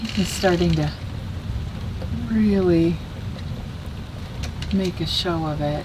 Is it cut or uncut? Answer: uncut